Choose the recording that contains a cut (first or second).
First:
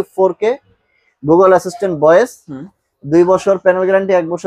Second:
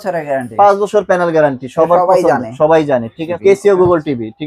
second